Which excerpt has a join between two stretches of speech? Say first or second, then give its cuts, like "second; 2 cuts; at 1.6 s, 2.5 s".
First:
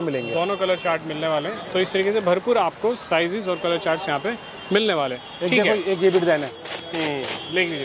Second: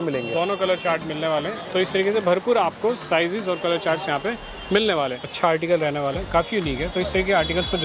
second; 1 cut; at 5.2 s